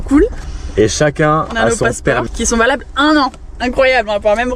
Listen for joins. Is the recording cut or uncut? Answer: cut